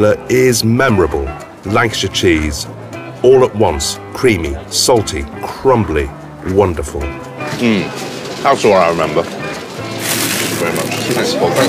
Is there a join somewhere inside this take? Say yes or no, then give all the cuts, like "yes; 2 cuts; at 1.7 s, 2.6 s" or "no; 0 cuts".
no; 0 cuts